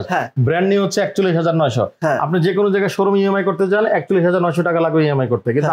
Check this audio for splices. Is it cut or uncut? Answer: uncut